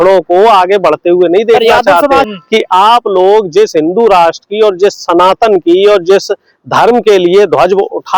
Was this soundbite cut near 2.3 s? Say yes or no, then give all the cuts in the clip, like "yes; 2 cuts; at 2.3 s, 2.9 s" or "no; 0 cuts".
yes; 1 cut; at 2.3 s